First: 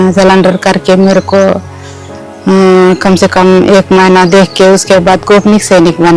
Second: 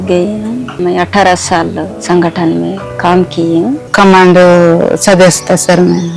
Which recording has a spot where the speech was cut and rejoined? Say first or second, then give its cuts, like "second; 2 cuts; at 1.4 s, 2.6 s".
second; 3 cuts; at 0.8 s, 2.0 s, 3.8 s